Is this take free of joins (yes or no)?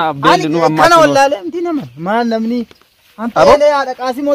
yes